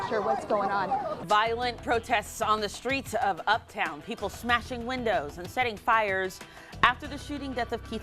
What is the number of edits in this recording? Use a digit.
1